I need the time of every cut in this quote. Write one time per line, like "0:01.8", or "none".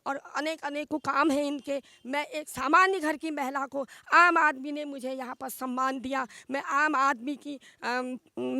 none